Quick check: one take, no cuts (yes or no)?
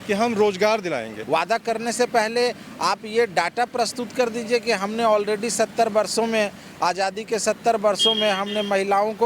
no